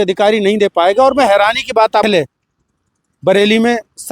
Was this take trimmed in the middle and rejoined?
yes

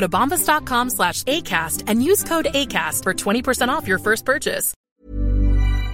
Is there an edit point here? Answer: yes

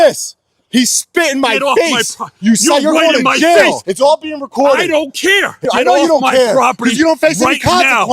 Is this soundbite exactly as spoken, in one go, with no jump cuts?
no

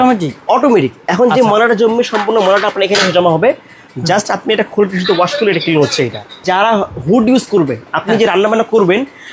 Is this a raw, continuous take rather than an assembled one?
no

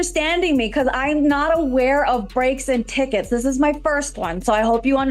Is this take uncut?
yes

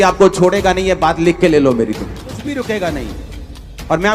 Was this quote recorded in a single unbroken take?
no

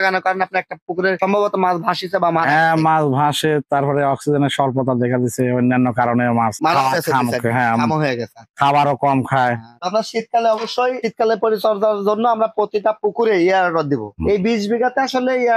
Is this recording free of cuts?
yes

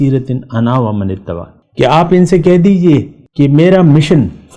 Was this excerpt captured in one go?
no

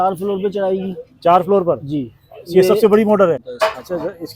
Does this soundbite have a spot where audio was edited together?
yes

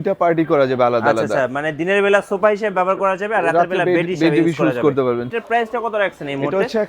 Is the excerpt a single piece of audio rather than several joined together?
no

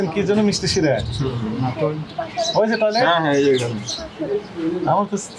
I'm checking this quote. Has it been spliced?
no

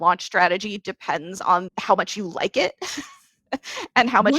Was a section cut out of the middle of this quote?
yes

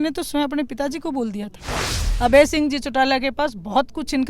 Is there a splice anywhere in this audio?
yes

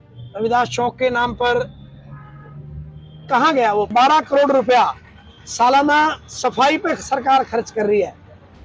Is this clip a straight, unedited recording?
no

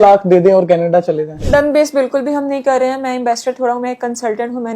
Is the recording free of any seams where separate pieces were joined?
no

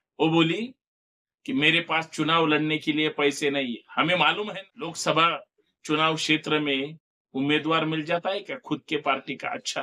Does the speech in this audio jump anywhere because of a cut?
yes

